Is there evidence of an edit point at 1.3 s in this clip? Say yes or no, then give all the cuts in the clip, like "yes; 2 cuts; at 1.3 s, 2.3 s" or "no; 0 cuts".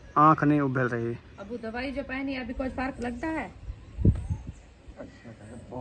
yes; 1 cut; at 1.3 s